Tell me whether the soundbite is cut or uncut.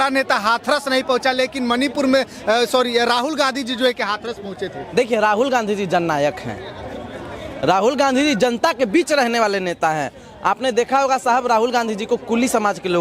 uncut